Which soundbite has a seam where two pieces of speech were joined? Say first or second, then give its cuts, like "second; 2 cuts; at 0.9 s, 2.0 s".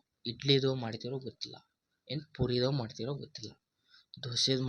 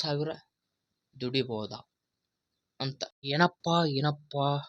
second; 1 cut; at 3.2 s